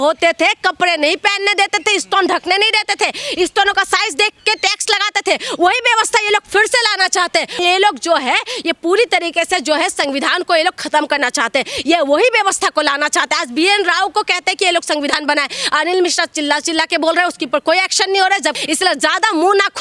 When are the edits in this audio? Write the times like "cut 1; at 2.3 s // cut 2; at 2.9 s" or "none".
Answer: cut 1; at 7.6 s // cut 2; at 18.6 s